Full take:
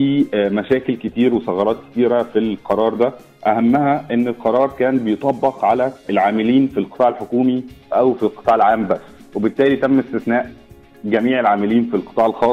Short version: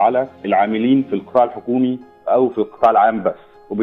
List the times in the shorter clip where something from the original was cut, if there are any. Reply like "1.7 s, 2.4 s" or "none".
none